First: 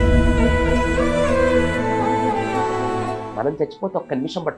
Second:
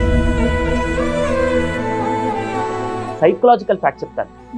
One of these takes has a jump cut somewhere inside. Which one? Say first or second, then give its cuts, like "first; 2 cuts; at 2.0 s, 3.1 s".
second; 1 cut; at 3.1 s